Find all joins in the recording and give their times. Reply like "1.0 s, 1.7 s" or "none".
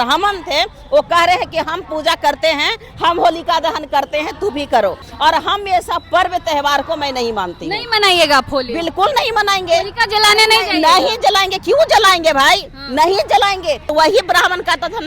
5.1 s, 13.9 s